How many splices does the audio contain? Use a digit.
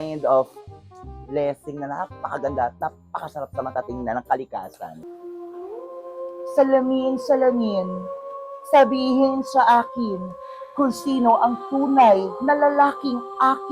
1